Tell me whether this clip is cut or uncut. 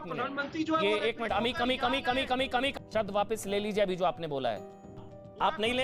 cut